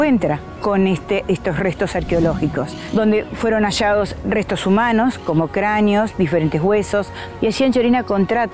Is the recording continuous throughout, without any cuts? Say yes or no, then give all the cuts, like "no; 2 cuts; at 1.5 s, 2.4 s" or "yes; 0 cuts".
no; 3 cuts; at 2.8 s, 4.2 s, 7.2 s